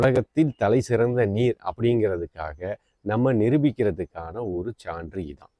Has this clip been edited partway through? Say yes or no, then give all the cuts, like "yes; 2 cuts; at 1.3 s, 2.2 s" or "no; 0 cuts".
no; 0 cuts